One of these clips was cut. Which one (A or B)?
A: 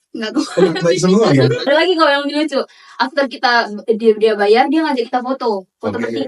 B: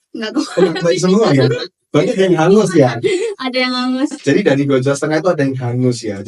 A